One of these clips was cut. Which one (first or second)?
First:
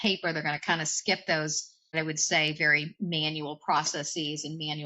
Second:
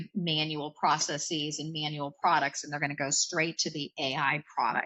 first